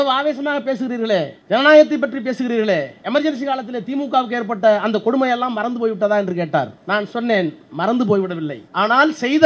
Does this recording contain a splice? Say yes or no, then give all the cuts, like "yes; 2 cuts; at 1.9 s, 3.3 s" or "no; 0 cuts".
yes; 4 cuts; at 1.4 s, 3.0 s, 6.8 s, 8.6 s